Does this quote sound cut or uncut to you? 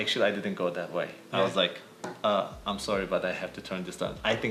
uncut